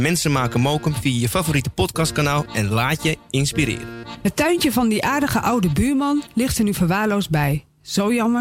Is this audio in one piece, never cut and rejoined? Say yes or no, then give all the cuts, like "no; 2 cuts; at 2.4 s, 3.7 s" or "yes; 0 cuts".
no; 1 cut; at 4.1 s